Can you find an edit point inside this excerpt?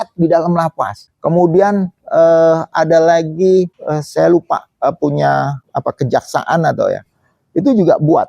yes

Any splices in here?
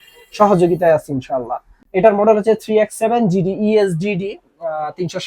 no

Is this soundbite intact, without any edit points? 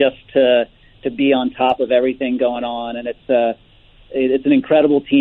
yes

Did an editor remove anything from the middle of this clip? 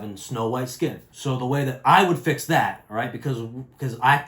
yes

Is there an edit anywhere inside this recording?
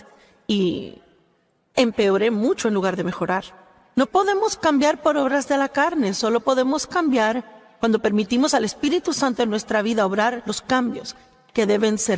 no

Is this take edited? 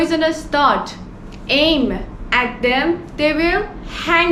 no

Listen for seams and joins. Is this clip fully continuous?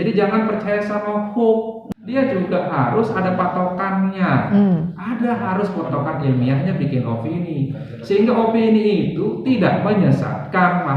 no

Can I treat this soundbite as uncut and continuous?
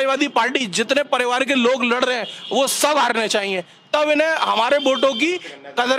yes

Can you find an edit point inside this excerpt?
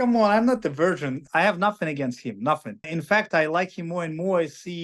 yes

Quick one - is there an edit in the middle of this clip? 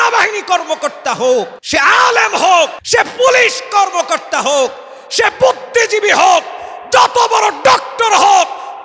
yes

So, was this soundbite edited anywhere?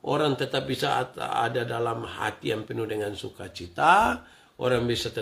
no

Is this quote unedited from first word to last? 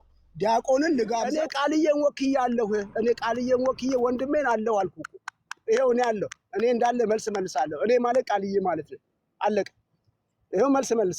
no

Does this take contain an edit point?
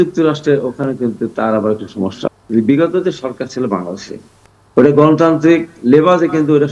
yes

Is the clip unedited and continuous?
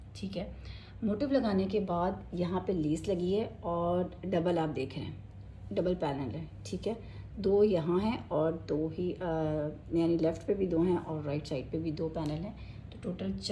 yes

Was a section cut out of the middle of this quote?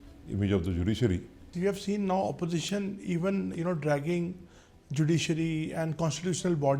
yes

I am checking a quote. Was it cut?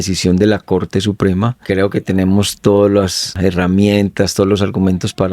yes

